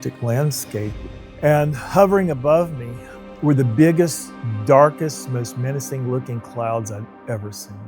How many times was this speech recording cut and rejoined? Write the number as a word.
one